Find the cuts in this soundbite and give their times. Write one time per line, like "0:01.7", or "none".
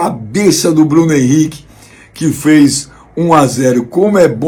none